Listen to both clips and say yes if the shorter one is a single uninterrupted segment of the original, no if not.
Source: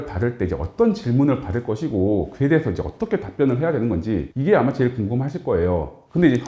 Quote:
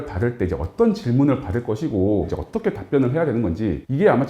no